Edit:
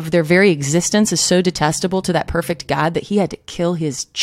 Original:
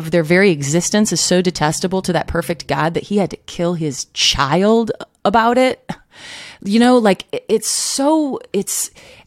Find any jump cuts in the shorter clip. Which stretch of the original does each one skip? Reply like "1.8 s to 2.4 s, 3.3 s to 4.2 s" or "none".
none